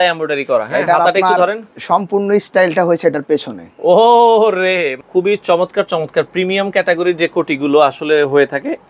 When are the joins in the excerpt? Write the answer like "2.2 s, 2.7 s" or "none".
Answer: 5.0 s